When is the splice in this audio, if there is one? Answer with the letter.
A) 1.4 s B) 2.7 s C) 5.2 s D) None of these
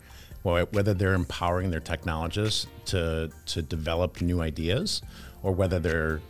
D